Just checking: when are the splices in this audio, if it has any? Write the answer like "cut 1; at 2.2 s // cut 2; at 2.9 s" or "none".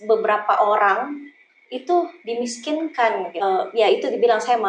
cut 1; at 3.4 s

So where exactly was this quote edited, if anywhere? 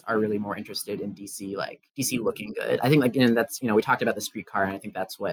none

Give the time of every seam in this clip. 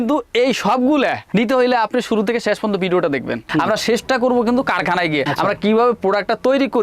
cut 1; at 3.5 s

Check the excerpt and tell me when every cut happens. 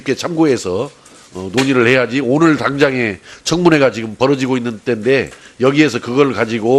none

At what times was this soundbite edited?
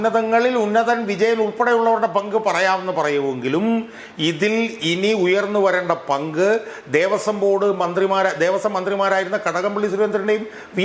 none

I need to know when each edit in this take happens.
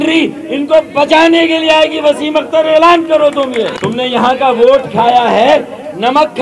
cut 1; at 3.7 s

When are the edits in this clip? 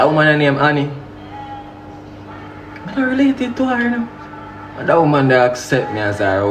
none

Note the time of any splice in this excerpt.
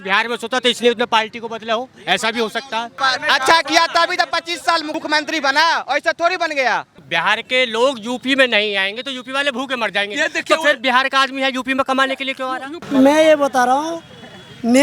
cut 1; at 2.9 s // cut 2; at 4.9 s // cut 3; at 7.0 s // cut 4; at 12.7 s

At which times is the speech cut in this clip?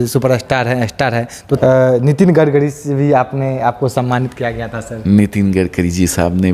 cut 1; at 1.6 s

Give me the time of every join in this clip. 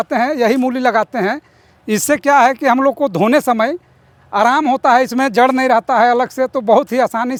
none

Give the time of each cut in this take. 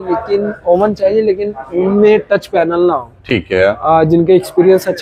none

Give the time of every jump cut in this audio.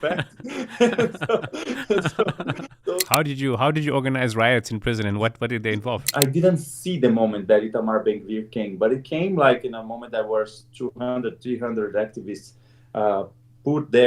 cut 1; at 3.0 s // cut 2; at 6.1 s

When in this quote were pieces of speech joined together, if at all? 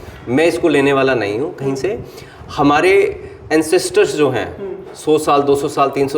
none

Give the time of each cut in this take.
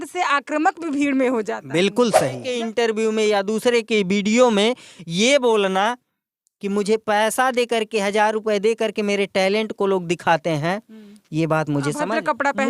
cut 1; at 2.5 s

